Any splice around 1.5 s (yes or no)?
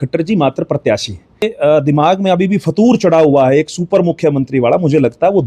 yes